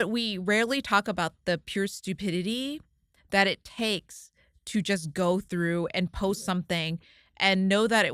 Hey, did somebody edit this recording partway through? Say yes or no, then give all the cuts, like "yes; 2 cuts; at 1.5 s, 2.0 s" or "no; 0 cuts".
no; 0 cuts